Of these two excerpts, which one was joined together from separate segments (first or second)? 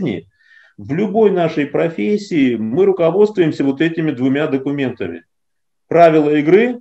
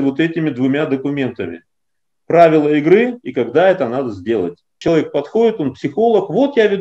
second